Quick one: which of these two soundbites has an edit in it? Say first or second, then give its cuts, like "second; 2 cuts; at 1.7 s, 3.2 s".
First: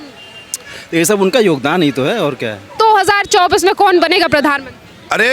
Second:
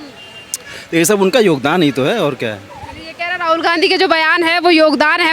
first; 1 cut; at 2.7 s